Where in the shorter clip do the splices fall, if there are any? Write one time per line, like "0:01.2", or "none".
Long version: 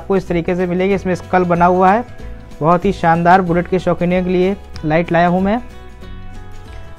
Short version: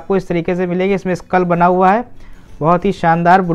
none